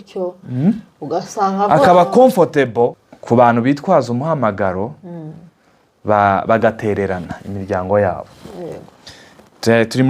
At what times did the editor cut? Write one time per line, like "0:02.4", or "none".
0:03.1

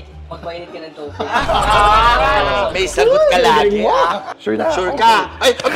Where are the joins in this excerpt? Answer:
0:04.3

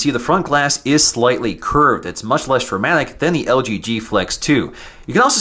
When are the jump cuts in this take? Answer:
0:01.4

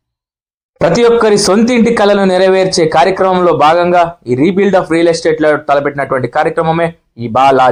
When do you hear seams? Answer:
none

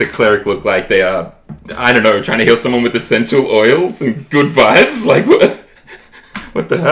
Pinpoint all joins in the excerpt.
none

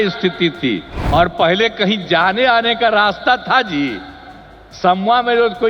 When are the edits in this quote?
0:00.9

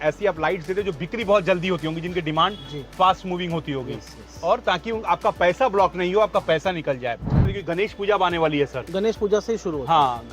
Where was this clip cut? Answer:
0:07.5

